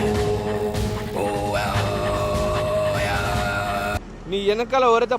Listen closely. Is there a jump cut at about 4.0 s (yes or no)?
yes